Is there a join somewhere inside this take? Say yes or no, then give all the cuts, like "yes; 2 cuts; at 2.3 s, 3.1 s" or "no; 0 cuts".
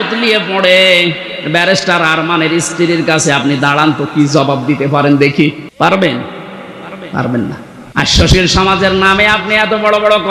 yes; 2 cuts; at 5.6 s, 7.7 s